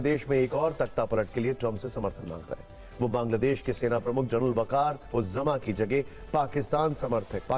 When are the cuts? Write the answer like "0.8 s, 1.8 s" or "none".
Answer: none